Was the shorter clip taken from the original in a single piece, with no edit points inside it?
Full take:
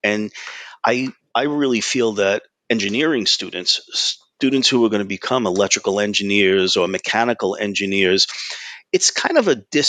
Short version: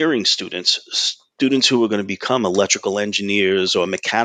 yes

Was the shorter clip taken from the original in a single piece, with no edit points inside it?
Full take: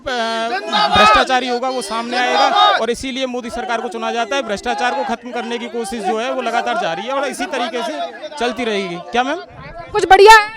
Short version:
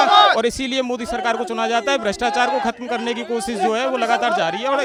yes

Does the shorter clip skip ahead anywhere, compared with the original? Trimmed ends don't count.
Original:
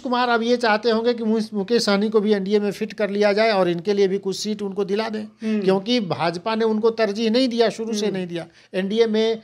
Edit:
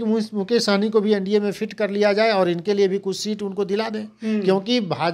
no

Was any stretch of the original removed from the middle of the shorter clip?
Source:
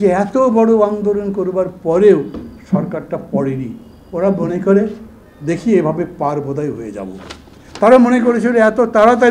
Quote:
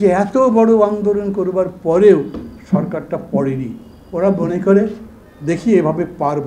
no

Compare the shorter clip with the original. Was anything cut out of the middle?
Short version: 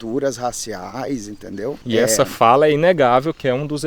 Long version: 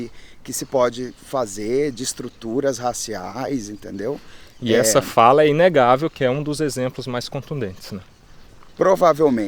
yes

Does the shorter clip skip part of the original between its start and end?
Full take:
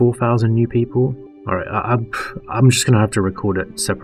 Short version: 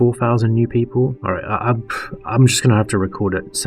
yes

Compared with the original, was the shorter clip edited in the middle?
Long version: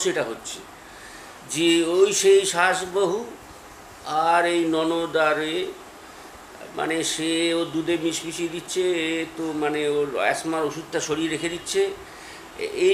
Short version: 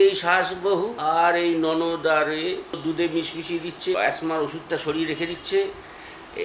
yes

